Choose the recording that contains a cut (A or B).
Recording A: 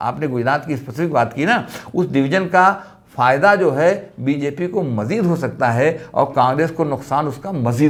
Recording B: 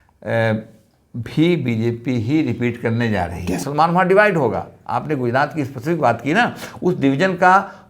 B